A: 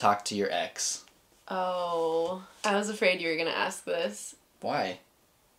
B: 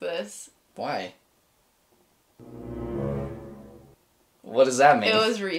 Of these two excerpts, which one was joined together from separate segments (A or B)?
A